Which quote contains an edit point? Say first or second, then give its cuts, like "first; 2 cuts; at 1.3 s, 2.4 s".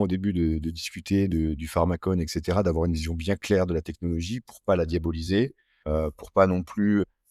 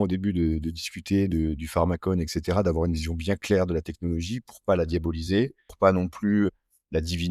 second; 1 cut; at 5.6 s